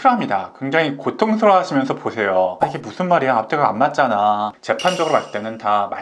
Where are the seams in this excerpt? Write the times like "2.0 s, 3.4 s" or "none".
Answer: 4.6 s